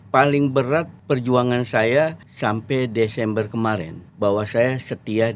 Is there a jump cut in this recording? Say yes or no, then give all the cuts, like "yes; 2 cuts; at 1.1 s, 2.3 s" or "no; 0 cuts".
yes; 3 cuts; at 0.9 s, 2.3 s, 4.0 s